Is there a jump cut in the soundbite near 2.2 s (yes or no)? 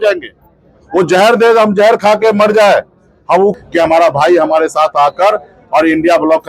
no